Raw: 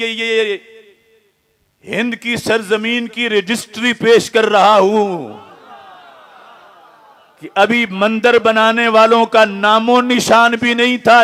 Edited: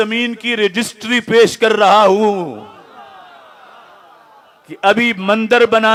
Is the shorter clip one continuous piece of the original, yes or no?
yes